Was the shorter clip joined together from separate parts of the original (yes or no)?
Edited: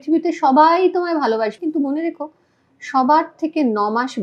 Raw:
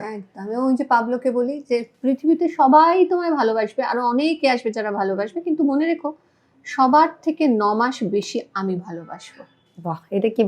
yes